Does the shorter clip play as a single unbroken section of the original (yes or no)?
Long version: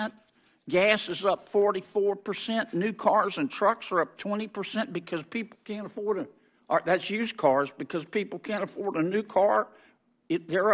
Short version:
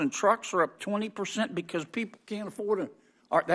yes